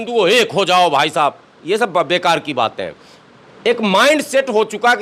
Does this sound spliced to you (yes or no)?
no